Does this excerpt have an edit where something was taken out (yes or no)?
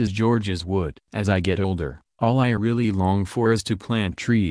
yes